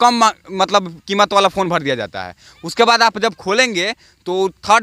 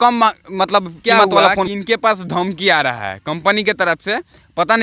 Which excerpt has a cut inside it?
second; 1 cut; at 1.7 s

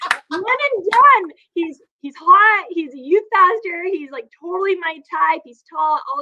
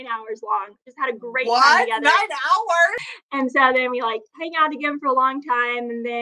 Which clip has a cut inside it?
second; 1 cut; at 3.0 s

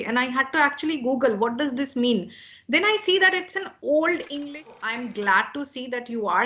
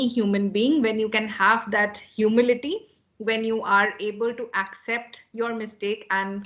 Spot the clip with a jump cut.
first; 1 cut; at 4.8 s

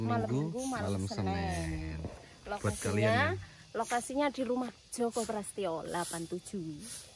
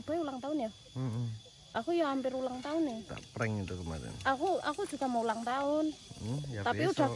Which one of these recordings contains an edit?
second; 1 cut; at 1.7 s

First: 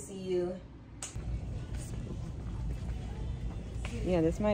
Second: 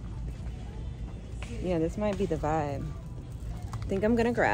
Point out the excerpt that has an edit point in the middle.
first; 1 cut; at 1.1 s

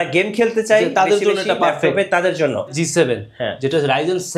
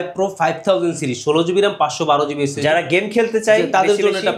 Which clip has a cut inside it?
first; 1 cut; at 2.8 s

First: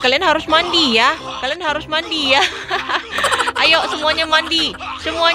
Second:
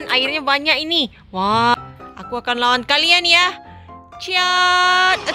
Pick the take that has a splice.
second; 1 cut; at 1.7 s

